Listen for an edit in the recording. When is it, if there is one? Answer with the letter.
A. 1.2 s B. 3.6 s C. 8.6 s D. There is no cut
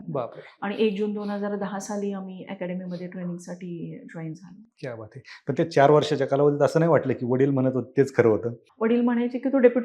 C